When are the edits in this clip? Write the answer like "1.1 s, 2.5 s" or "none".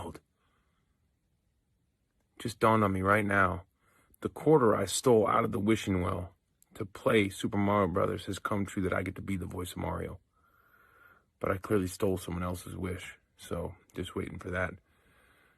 none